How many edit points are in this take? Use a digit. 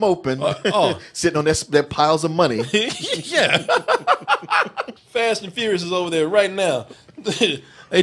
1